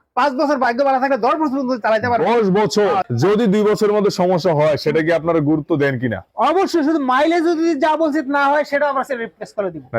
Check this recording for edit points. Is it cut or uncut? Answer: cut